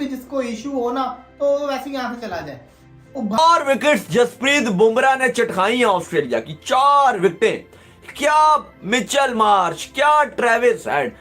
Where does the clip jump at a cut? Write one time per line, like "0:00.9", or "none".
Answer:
0:03.4